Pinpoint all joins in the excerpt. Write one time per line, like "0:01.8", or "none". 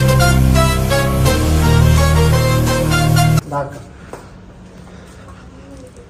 none